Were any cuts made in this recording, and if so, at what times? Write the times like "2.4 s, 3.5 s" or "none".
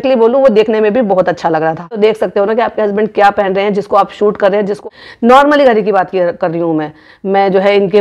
2.0 s, 4.8 s